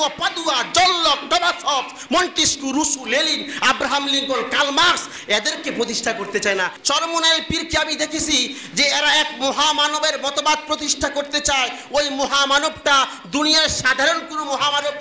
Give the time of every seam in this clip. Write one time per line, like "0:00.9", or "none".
0:06.8